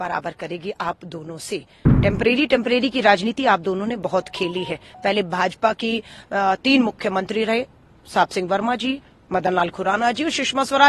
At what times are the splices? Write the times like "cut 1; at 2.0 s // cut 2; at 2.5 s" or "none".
cut 1; at 1.8 s